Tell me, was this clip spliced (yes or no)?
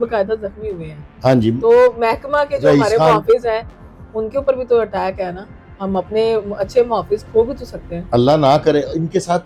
no